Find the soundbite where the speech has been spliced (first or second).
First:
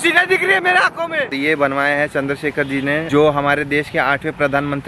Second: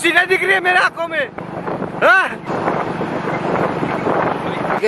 first